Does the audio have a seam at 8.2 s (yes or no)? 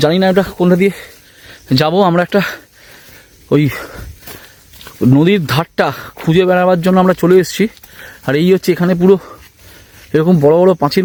no